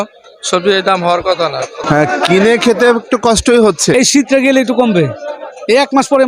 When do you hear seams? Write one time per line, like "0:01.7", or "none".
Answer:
0:01.9
0:03.9